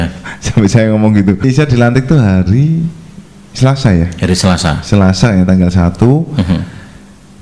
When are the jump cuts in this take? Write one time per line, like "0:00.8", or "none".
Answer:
0:01.4